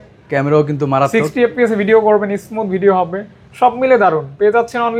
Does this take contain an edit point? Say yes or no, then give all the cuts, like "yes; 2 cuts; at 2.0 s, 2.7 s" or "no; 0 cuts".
no; 0 cuts